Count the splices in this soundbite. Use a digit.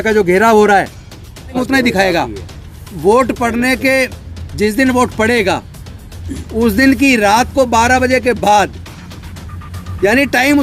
1